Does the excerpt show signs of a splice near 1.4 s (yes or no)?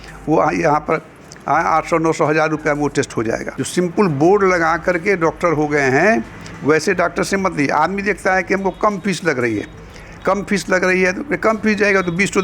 no